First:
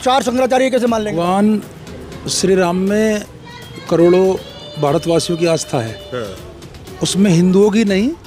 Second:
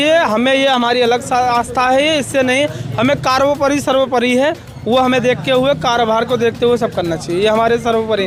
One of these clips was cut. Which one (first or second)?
first